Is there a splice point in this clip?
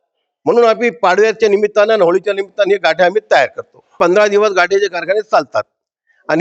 yes; 1 cut; at 3.9 s

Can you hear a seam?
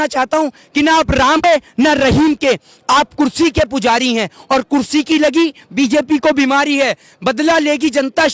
yes; 1 cut; at 1.4 s

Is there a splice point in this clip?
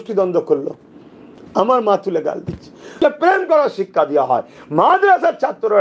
yes; 1 cut; at 2.9 s

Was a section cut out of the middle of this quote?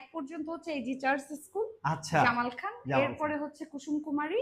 no; 0 cuts

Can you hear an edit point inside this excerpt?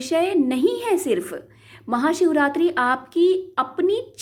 no; 0 cuts

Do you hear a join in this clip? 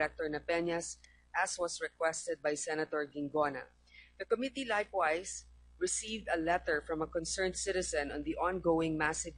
yes; 1 cut; at 4.5 s

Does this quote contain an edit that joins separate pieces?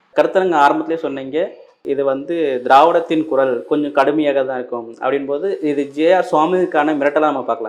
no; 0 cuts

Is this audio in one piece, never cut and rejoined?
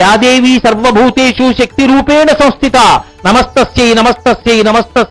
yes; 0 cuts

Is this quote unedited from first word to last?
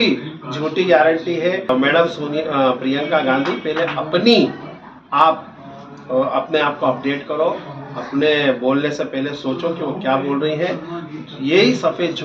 no; 1 cut; at 1.7 s

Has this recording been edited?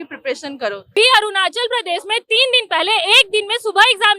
yes; 1 cut; at 0.9 s

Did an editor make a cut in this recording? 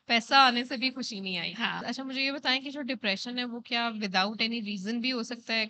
yes; 1 cut; at 1.8 s

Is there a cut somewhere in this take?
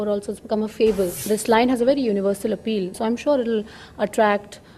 yes; 2 cuts; at 1.2 s, 2.9 s

